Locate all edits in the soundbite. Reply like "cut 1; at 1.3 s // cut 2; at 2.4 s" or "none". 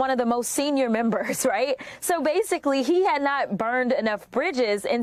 none

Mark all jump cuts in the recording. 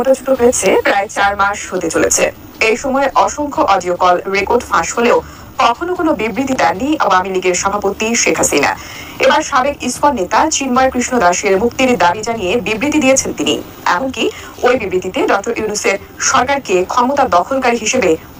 none

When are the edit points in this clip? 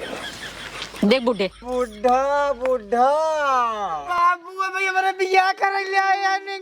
cut 1; at 1.7 s

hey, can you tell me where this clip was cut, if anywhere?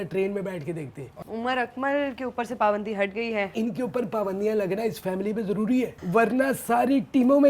cut 1; at 1.2 s // cut 2; at 3.5 s // cut 3; at 6.0 s

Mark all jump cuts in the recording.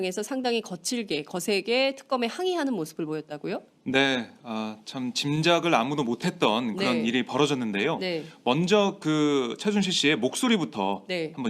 cut 1; at 1.4 s

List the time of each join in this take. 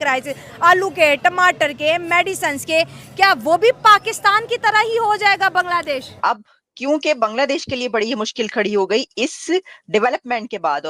cut 1; at 6.1 s

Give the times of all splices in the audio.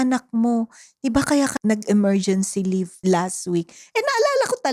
cut 1; at 1.5 s // cut 2; at 2.9 s

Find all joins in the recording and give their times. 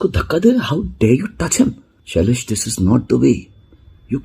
cut 1; at 1.9 s

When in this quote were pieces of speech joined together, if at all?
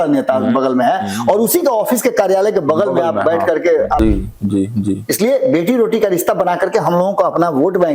cut 1; at 4.0 s

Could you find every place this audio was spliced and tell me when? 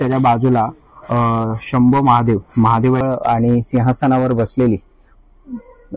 cut 1; at 3.0 s

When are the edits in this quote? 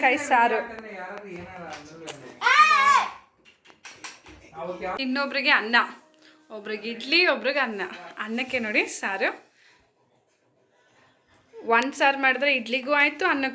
cut 1; at 5.0 s

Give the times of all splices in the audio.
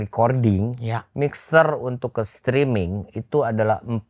none

